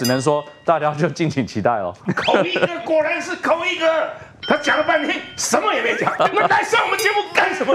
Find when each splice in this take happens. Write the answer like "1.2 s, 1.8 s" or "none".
2.0 s, 6.1 s